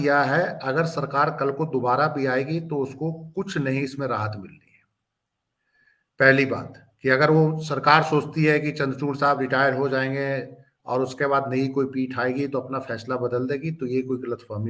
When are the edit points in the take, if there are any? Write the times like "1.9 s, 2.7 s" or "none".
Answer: none